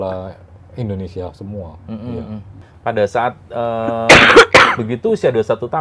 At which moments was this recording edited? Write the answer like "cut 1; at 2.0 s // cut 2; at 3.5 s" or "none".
cut 1; at 2.5 s